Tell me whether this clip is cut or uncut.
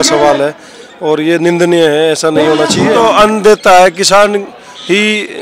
cut